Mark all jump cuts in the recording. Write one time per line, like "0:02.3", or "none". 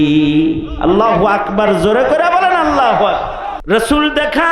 0:03.5